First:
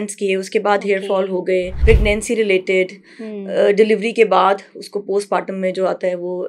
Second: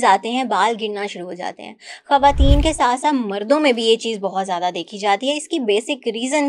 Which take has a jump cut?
first; 1 cut; at 1.7 s

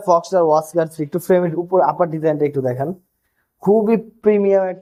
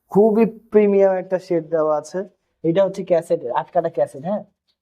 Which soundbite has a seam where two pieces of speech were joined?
second; 1 cut; at 2.6 s

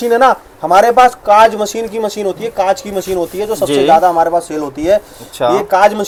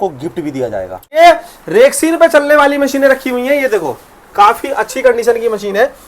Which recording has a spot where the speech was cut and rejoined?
second; 1 cut; at 1.1 s

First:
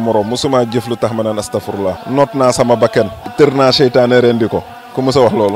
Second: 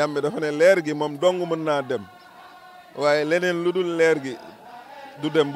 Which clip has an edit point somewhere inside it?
first; 2 cuts; at 2.0 s, 3.2 s

